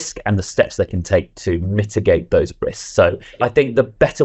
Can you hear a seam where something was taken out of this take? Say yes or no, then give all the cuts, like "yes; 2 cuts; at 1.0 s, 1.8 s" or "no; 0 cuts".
yes; 2 cuts; at 1.3 s, 3.3 s